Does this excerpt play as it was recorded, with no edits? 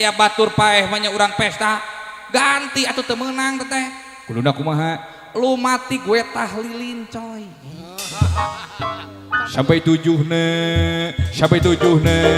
yes; 0 cuts

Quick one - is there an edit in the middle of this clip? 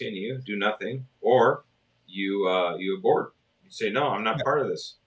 no; 0 cuts

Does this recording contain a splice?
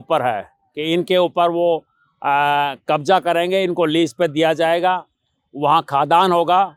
no; 0 cuts

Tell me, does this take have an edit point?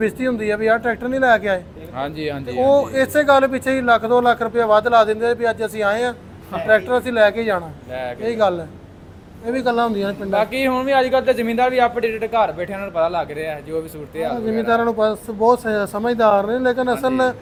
no; 0 cuts

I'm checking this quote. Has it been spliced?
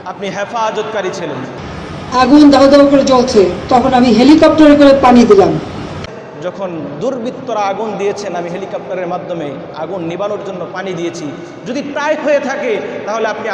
yes; 1 cut; at 1.6 s

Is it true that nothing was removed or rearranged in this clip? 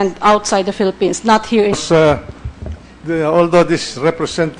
yes; 0 cuts

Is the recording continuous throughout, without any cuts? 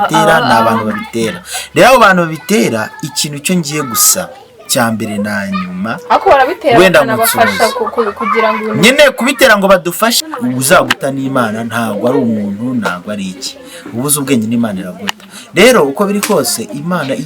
no; 1 cut; at 10.2 s

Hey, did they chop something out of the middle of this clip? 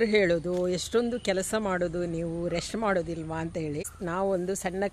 yes; 1 cut; at 3.9 s

